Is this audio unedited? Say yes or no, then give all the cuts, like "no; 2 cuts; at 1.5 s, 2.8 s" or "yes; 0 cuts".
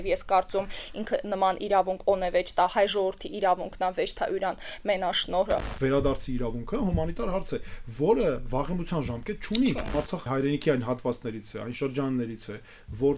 no; 2 cuts; at 5.7 s, 10.1 s